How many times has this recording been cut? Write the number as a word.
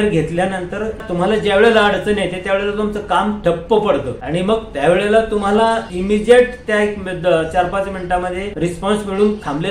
one